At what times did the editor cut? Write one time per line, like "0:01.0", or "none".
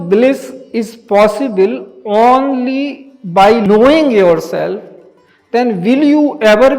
0:03.7